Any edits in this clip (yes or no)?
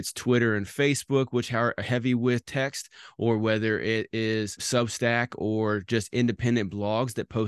yes